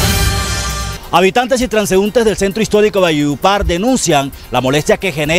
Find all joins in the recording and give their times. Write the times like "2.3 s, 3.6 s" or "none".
0.9 s